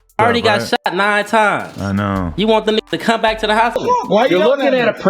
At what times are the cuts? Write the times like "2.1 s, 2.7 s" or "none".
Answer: 3.8 s